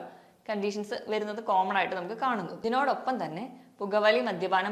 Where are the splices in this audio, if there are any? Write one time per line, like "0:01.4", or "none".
0:02.5